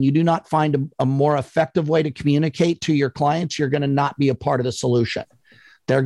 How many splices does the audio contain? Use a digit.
0